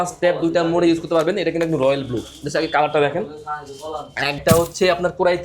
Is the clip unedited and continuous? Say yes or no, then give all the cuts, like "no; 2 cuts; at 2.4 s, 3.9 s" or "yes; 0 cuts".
no; 1 cut; at 4.4 s